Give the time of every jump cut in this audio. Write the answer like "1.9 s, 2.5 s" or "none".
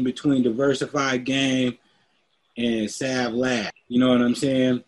3.8 s